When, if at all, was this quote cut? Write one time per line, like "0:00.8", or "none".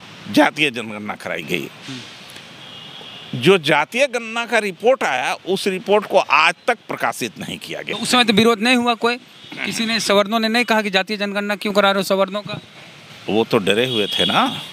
0:07.9